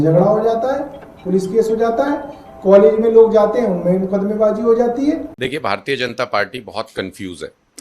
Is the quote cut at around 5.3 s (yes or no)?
yes